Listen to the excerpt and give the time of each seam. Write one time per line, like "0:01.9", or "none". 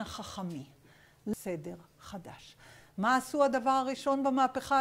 0:01.3

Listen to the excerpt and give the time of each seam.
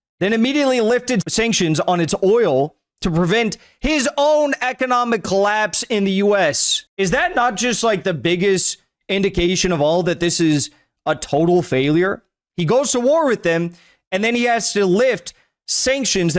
0:01.3

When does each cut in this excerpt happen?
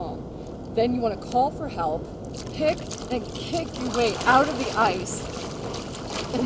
none

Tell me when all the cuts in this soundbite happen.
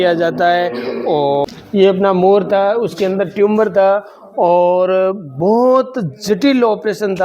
0:01.5

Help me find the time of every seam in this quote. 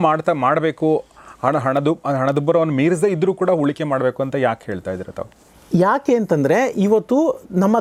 none

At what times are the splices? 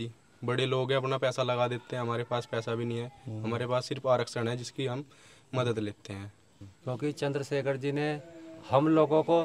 0:06.5

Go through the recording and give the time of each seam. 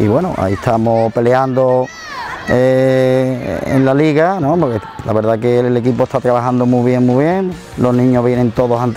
0:07.6

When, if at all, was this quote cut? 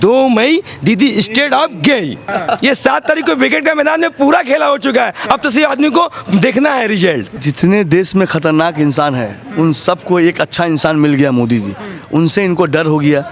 0:02.2
0:07.4

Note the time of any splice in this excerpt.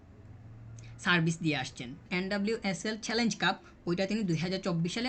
0:02.1

